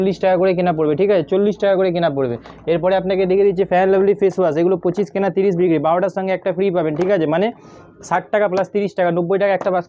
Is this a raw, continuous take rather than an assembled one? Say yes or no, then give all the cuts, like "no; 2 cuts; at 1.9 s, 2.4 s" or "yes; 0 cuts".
yes; 0 cuts